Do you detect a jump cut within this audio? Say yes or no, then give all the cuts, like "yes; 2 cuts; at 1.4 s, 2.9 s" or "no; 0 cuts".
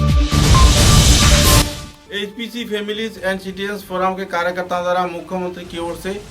no; 0 cuts